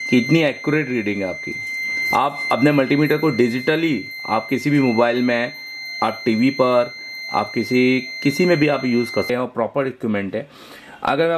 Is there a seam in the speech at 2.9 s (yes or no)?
no